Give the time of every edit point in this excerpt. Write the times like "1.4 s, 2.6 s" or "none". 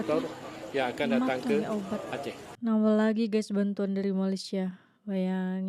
none